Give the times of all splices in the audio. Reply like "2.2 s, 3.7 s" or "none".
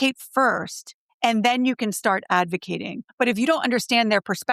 3.0 s